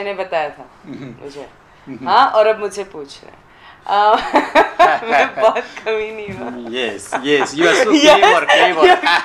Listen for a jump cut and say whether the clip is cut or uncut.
uncut